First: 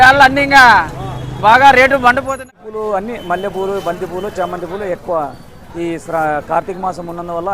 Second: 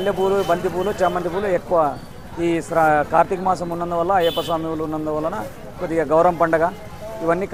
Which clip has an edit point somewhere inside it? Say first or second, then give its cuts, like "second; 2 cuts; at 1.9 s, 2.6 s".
first; 1 cut; at 2.3 s